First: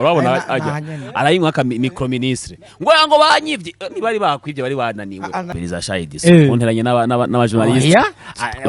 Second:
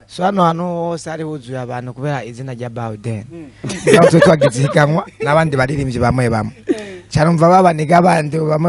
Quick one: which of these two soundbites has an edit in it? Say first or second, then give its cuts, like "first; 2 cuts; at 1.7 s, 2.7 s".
first; 1 cut; at 5.5 s